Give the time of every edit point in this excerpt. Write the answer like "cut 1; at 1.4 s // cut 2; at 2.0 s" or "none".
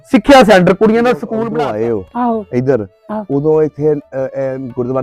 cut 1; at 1.3 s